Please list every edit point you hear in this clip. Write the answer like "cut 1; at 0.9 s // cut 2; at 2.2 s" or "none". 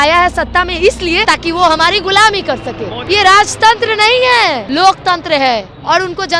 cut 1; at 1.2 s // cut 2; at 3.0 s // cut 3; at 4.6 s

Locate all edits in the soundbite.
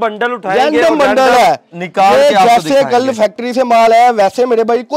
none

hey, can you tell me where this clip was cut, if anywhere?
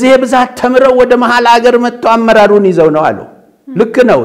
none

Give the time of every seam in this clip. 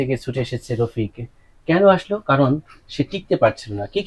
none

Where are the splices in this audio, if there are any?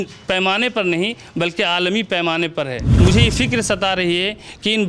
cut 1; at 2.8 s

